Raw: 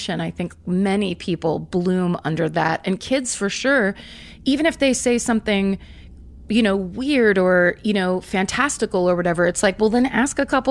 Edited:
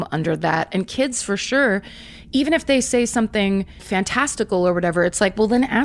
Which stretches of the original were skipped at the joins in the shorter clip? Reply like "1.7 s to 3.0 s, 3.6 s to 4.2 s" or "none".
6.0 s to 8.3 s